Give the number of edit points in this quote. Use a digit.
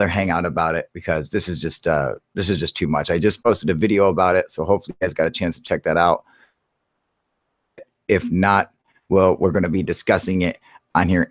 1